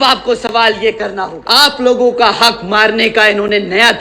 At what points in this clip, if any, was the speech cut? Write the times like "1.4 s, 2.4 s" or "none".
1.4 s